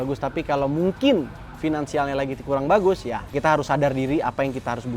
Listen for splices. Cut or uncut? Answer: cut